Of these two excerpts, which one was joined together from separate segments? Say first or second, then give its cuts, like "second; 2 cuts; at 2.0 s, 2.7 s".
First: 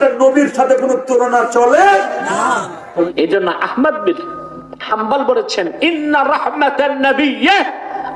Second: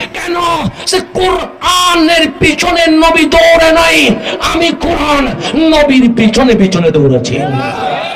first; 1 cut; at 3.1 s